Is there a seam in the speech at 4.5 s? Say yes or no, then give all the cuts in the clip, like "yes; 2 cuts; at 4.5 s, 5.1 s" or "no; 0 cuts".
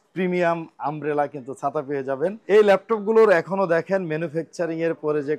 no; 1 cut; at 2.4 s